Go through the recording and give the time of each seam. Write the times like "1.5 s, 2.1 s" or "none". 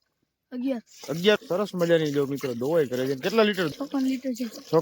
1.4 s, 3.7 s